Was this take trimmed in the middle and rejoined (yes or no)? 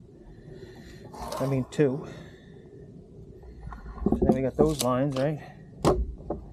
no